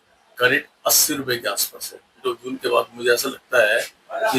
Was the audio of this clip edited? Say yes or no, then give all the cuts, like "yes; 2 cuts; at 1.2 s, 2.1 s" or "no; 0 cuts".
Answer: yes; 1 cut; at 2.1 s